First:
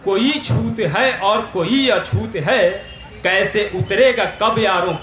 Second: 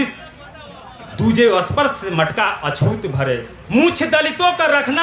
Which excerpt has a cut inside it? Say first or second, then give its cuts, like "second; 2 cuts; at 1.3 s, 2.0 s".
second; 1 cut; at 3.5 s